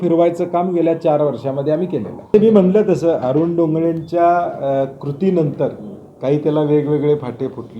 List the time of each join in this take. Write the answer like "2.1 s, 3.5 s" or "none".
2.3 s

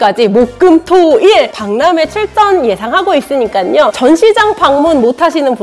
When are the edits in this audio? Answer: 4.0 s

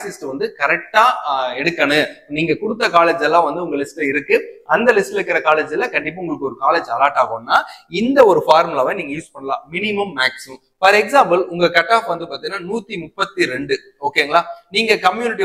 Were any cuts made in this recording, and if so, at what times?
none

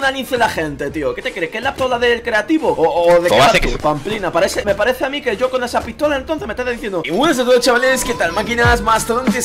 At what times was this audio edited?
7.0 s

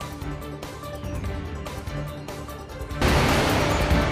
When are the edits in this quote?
1.0 s, 1.7 s

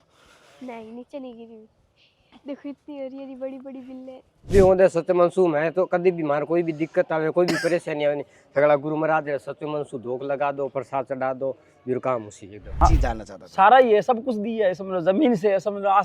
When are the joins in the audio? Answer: 4.5 s, 12.8 s

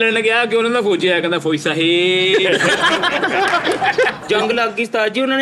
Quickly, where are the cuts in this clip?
4.2 s

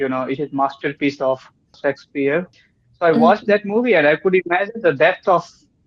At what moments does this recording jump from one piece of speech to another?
1.8 s, 2.6 s

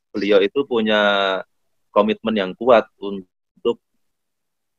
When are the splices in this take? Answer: none

